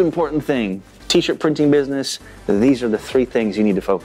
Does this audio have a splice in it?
no; 0 cuts

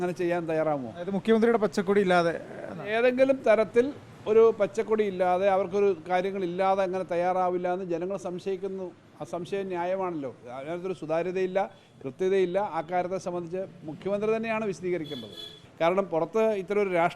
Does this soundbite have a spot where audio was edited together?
yes; 1 cut; at 15.6 s

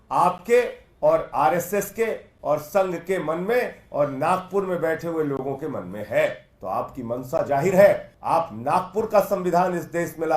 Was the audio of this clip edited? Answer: yes; 2 cuts; at 6.5 s, 8.1 s

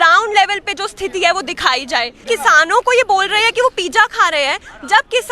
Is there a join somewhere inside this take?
yes; 1 cut; at 2.3 s

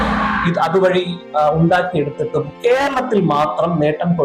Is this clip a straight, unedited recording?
yes; 0 cuts

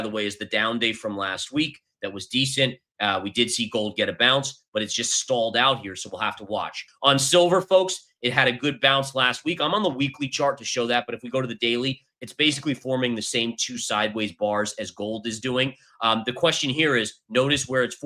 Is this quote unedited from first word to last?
no; 1 cut; at 6.9 s

